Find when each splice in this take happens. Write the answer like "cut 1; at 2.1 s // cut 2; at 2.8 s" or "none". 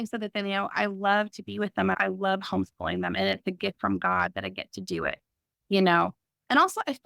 cut 1; at 1.9 s